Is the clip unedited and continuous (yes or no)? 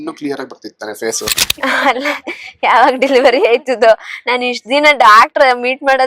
no